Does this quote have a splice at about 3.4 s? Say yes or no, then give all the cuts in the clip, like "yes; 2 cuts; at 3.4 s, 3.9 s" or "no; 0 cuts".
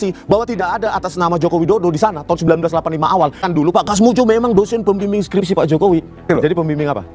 yes; 2 cuts; at 3.4 s, 6.3 s